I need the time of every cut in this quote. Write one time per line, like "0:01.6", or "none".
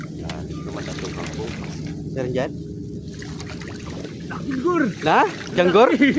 none